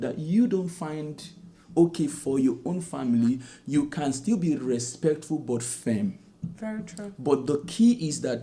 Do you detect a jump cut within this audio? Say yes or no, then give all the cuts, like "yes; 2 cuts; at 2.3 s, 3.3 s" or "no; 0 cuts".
no; 0 cuts